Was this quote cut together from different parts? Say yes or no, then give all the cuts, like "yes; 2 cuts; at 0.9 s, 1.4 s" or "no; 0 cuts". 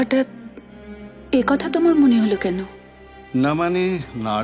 no; 0 cuts